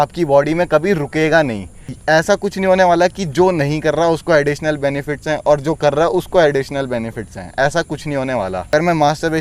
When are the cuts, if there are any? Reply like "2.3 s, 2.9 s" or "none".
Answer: 1.9 s, 8.7 s